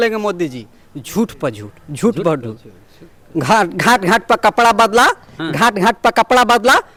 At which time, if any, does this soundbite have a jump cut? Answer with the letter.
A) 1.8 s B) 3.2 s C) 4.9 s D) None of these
D